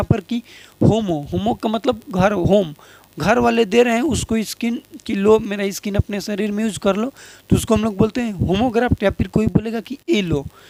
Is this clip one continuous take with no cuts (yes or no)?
yes